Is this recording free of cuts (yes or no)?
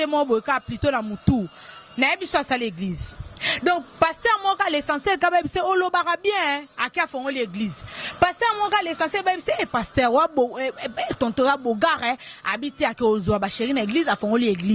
yes